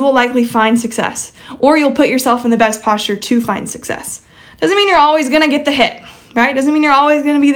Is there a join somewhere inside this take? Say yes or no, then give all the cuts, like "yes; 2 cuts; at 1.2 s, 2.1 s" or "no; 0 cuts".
no; 0 cuts